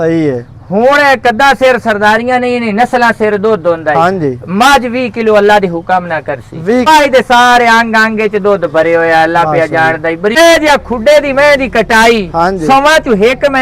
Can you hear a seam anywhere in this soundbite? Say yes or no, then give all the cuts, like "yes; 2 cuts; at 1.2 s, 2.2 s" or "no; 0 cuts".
yes; 2 cuts; at 6.8 s, 10.4 s